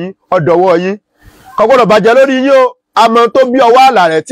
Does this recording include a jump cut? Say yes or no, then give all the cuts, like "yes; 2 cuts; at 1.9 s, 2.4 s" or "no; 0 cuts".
yes; 1 cut; at 2.8 s